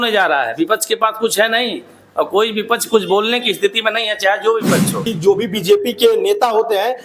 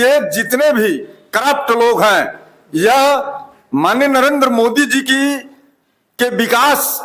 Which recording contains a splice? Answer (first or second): first